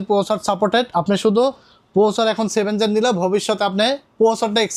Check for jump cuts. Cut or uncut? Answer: uncut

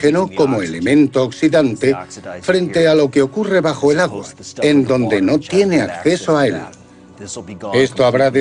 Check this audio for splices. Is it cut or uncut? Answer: cut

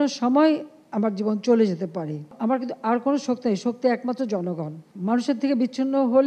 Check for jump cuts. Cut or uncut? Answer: uncut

